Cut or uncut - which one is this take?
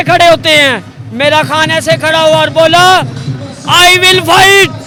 uncut